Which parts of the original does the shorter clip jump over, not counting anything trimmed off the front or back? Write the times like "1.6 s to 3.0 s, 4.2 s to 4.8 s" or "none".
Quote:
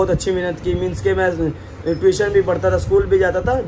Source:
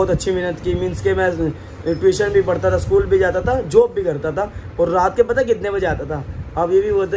none